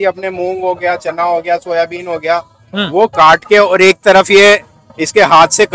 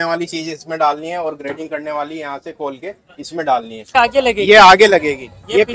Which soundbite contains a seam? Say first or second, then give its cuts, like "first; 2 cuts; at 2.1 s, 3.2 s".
second; 1 cut; at 3.8 s